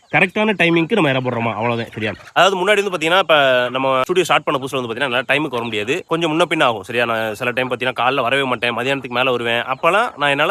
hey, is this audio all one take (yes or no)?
yes